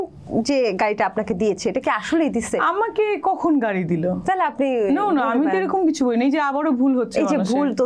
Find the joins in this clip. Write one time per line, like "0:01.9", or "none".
none